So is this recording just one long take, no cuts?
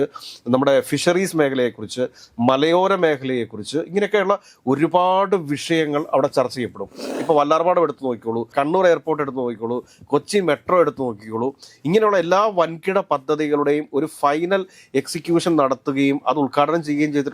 no; 2 cuts; at 7.1 s, 8.5 s

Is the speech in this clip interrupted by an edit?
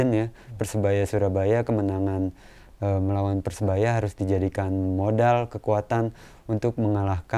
no; 0 cuts

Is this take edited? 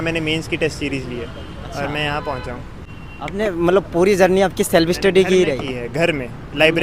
no; 0 cuts

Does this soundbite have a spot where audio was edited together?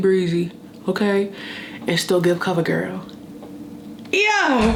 no; 0 cuts

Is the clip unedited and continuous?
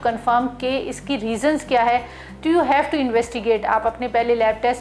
yes; 0 cuts

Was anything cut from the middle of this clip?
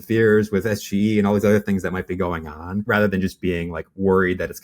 no; 0 cuts

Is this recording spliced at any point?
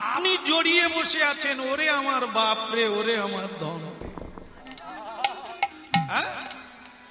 no; 0 cuts

